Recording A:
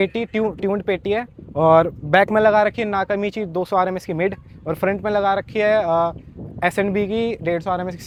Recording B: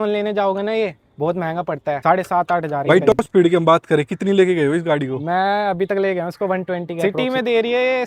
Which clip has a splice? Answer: B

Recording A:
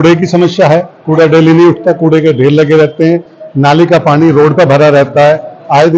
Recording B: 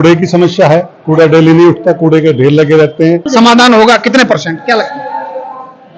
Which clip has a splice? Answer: B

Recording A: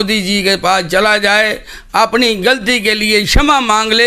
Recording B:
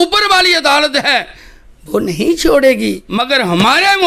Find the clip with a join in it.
B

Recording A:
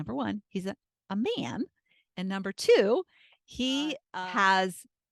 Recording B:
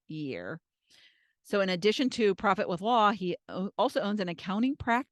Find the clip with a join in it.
A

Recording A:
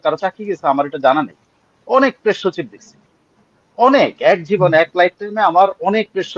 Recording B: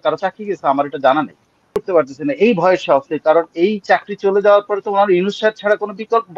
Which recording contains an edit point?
B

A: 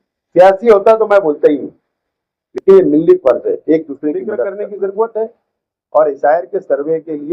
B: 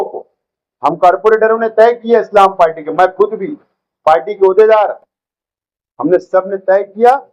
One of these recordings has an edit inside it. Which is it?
A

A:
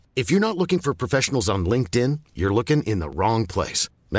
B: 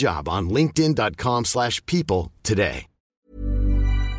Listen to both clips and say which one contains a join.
B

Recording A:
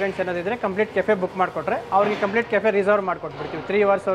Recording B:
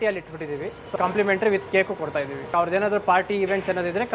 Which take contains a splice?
B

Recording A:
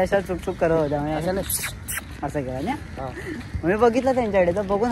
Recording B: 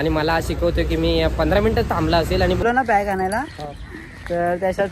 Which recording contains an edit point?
B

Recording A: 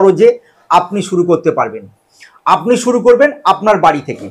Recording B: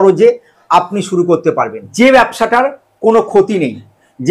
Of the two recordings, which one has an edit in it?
B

